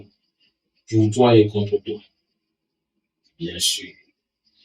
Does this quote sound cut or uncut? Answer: uncut